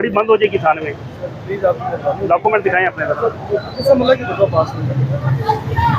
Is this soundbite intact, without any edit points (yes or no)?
yes